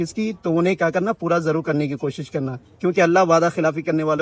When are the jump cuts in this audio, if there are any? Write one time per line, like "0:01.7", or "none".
none